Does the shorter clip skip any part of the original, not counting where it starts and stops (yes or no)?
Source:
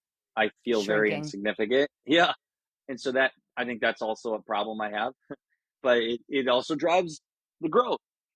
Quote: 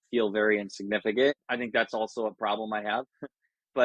yes